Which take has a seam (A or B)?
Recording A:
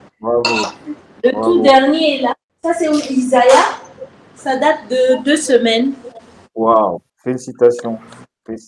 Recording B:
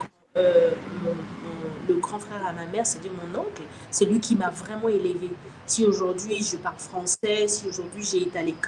A